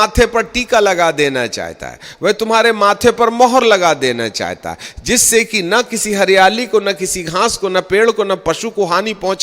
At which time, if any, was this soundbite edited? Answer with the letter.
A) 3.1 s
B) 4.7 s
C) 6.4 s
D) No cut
D